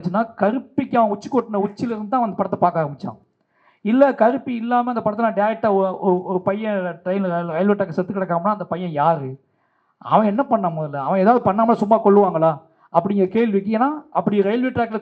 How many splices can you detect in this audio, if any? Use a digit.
0